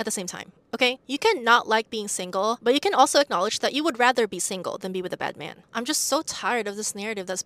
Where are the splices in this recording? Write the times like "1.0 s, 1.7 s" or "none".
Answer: 5.5 s